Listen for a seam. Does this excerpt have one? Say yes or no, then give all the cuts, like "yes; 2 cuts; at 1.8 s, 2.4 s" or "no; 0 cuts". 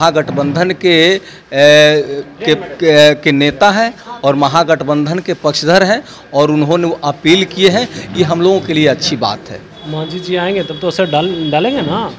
no; 0 cuts